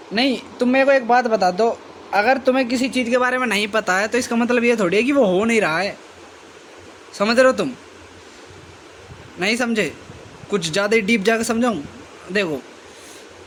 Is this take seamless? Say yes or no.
yes